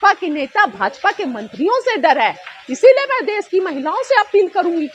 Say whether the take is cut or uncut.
uncut